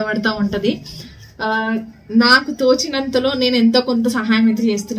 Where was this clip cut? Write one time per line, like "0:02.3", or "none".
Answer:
none